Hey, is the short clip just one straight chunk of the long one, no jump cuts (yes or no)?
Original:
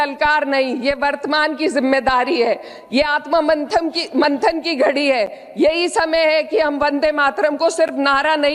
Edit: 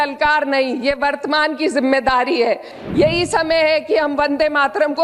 no